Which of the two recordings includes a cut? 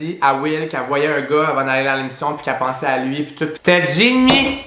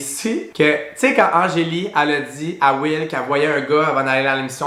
first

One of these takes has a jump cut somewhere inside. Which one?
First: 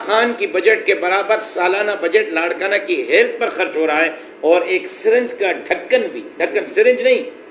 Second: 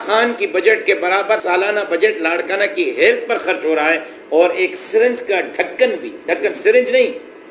second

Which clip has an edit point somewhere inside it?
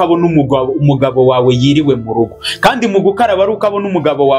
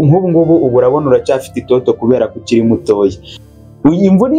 second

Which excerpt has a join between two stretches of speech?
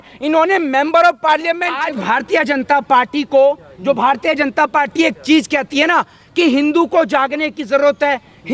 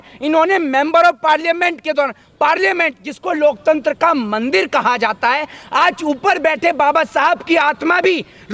first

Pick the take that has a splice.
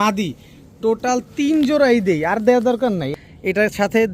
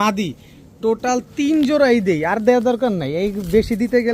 first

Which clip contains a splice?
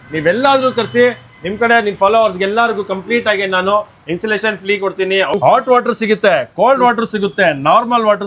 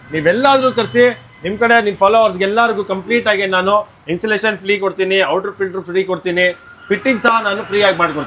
first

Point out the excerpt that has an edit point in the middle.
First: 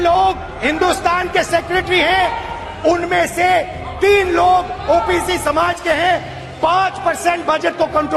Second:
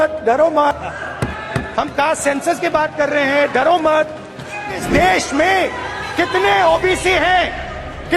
second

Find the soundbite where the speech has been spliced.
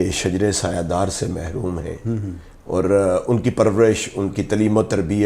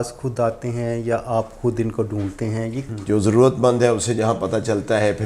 second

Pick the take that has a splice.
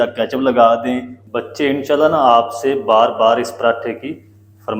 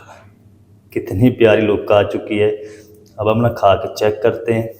first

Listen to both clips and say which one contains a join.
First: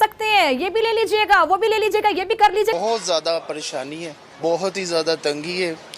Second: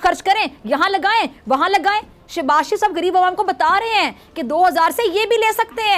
first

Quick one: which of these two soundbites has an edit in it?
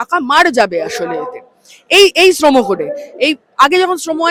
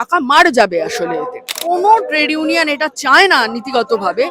second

